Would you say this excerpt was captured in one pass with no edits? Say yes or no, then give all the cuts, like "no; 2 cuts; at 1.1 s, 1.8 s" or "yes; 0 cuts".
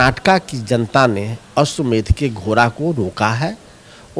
yes; 0 cuts